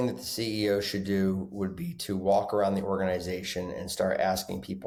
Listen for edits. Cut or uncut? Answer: uncut